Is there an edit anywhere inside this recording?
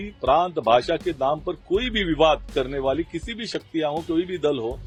no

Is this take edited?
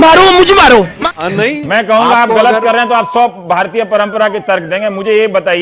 yes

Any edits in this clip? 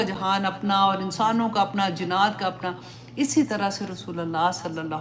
no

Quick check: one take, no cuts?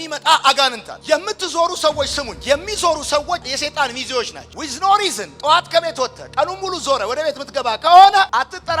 no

